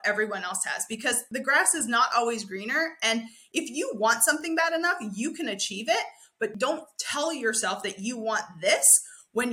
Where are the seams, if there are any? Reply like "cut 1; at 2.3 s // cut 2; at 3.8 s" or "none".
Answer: cut 1; at 1.2 s // cut 2; at 6.5 s